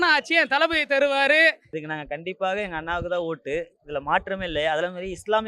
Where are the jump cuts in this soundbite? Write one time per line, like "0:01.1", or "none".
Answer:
0:01.7